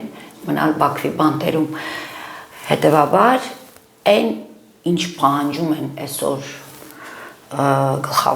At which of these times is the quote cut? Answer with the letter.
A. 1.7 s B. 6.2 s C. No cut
C